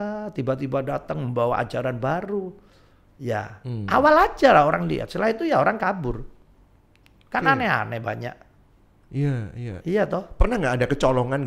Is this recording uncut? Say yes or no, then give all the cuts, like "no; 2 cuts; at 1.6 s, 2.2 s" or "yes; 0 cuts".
yes; 0 cuts